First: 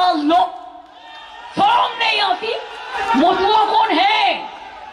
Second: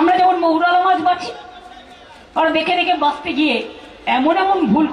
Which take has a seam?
first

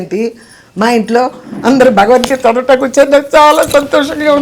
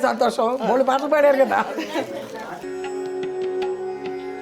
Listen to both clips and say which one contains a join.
second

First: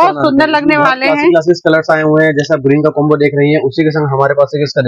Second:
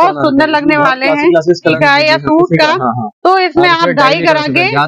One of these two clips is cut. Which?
second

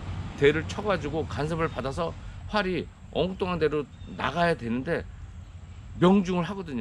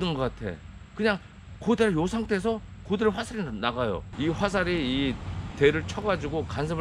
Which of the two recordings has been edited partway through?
second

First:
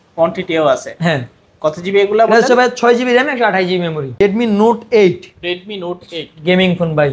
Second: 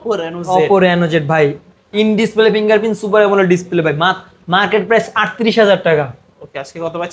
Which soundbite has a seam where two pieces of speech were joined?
first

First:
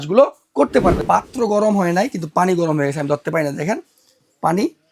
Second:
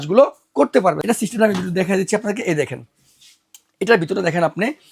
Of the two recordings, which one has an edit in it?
first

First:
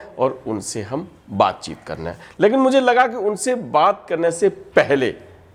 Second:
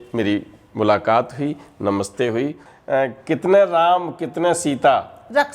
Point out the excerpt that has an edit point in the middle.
second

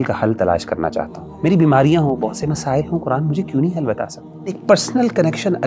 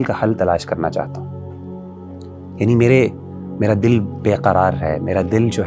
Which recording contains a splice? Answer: first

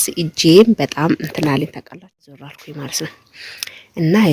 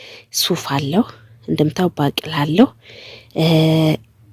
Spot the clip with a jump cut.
first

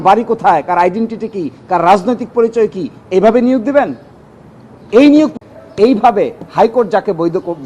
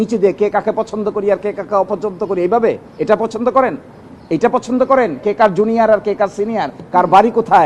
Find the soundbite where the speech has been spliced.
first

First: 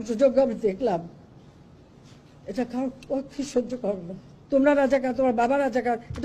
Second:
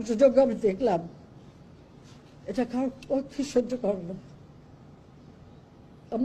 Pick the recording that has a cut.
first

